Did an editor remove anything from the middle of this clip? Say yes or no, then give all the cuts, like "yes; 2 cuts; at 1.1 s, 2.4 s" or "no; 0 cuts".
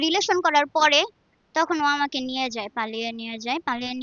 no; 0 cuts